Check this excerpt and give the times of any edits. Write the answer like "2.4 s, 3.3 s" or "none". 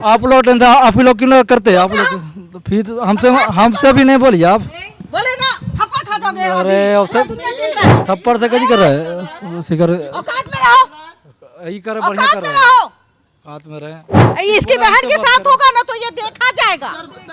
14.3 s